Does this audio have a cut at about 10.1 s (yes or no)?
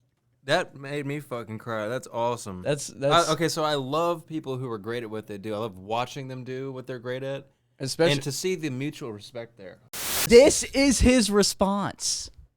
yes